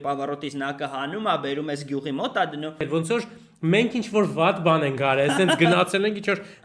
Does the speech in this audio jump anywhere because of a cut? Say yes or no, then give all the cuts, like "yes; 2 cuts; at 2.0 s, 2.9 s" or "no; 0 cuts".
yes; 1 cut; at 2.8 s